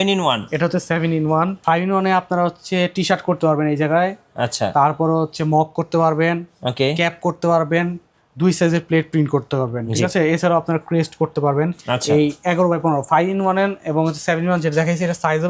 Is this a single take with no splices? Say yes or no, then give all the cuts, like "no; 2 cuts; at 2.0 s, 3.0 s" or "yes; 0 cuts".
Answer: no; 1 cut; at 1.6 s